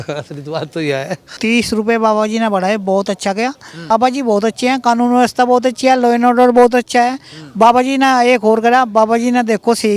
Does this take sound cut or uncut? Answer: cut